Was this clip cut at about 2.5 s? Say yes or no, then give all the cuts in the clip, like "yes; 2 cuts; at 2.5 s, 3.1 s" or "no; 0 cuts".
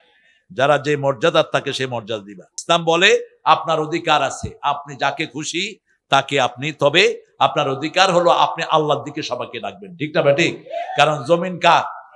yes; 1 cut; at 2.5 s